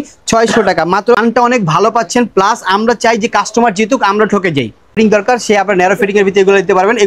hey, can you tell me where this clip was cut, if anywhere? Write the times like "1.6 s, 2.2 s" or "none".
1.2 s, 5.0 s